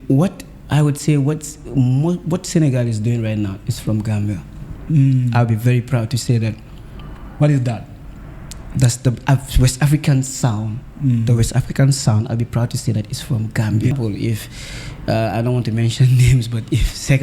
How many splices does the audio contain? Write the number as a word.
one